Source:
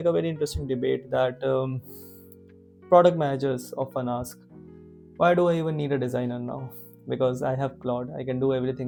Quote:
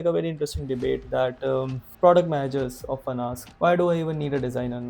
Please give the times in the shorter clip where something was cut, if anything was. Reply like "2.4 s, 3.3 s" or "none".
1.8 s, 3.4 s